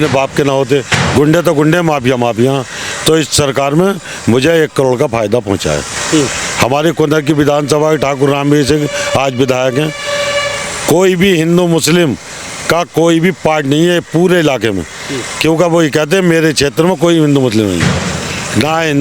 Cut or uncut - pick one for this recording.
uncut